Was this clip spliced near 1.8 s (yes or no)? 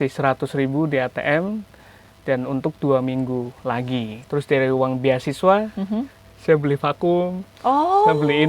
no